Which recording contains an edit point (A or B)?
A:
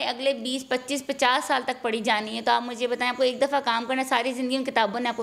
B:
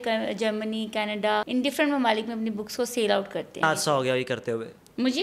B